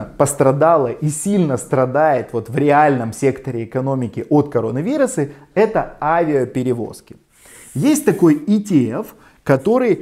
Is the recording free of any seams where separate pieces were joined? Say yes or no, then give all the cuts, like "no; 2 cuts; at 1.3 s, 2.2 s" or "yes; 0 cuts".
yes; 0 cuts